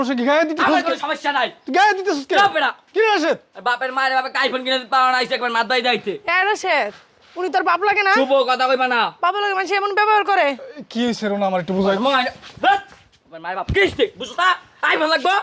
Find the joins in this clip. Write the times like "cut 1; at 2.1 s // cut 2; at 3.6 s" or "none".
none